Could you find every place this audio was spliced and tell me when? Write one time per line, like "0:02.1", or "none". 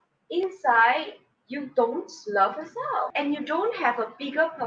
0:03.1